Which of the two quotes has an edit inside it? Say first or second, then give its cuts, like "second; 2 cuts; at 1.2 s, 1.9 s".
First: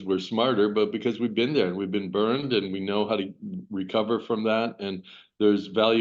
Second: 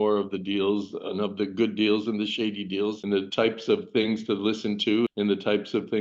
second; 2 cuts; at 3.0 s, 5.1 s